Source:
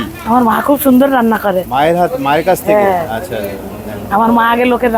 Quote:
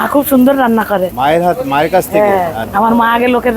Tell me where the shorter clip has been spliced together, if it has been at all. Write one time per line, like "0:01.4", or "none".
0:02.6